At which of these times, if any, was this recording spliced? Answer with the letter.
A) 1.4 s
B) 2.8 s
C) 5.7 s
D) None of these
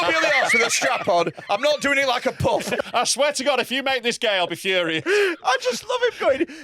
B